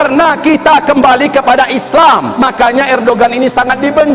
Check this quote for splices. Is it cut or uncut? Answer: cut